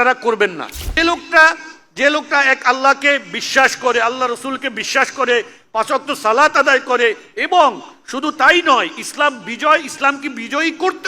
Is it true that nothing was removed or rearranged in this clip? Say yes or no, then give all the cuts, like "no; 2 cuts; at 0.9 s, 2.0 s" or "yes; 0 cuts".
no; 1 cut; at 1.0 s